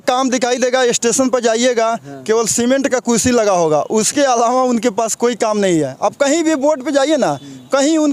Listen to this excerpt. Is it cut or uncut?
uncut